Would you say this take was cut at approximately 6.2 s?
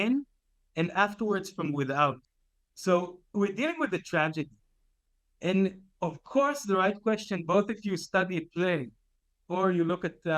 no; 1 cut; at 2.2 s

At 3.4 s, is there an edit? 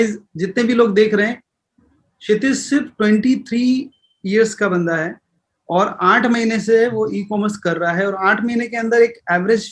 no; 0 cuts

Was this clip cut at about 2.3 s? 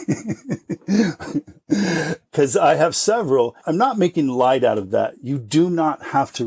yes; 2 cuts; at 2.3 s, 3.6 s

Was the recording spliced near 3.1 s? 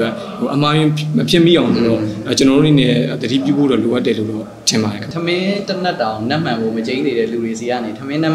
no; 1 cut; at 5.1 s

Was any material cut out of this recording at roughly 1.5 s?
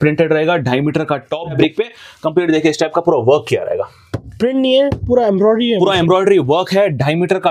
yes; 1 cut; at 1.5 s

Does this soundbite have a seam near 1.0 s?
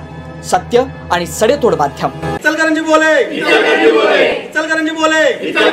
no; 1 cut; at 2.4 s

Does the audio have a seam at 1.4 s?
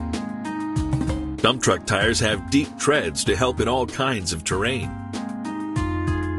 yes; 2 cuts; at 1.4 s, 5.0 s

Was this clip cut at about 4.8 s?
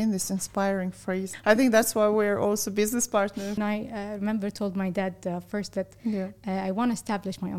no; 2 cuts; at 1.3 s, 3.6 s

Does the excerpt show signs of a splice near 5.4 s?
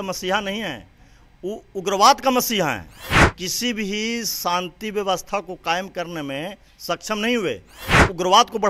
no; 1 cut; at 3.0 s

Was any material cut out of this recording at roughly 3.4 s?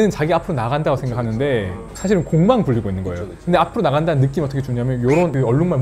no; 0 cuts

